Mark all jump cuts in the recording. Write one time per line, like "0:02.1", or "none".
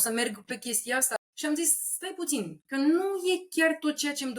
0:01.1